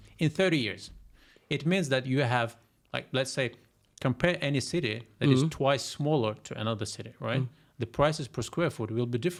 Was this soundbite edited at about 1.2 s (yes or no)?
no